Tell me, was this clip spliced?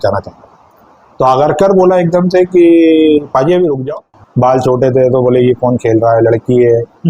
yes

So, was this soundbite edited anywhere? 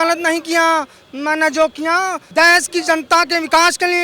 yes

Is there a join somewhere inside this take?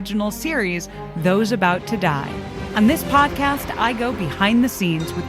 yes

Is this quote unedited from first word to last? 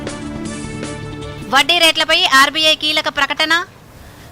no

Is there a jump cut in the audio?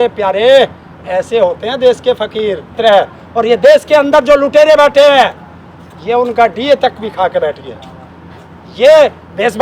yes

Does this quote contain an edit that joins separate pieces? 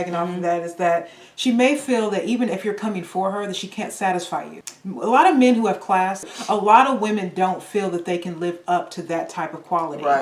yes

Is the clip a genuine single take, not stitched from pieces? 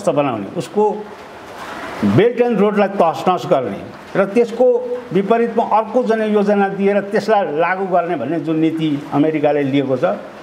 yes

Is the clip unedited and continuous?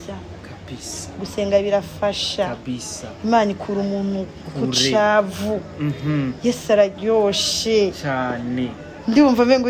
yes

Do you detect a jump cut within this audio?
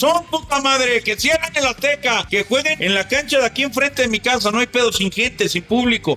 yes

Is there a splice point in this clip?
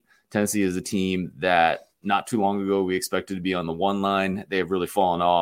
no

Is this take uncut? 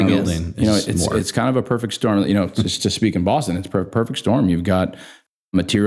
yes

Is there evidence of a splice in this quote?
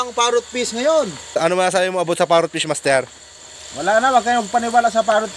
no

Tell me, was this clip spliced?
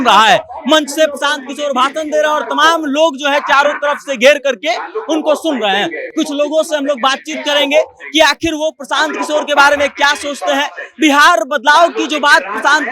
no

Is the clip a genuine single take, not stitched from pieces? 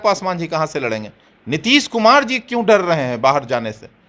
yes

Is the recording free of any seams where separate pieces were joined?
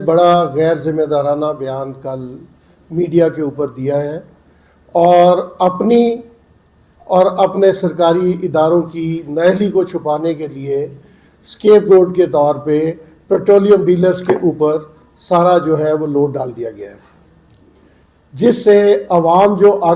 yes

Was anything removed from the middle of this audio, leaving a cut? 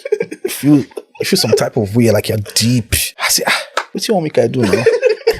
yes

